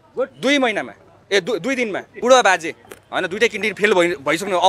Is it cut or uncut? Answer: cut